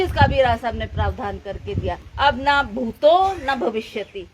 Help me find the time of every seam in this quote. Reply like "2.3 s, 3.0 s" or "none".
2.1 s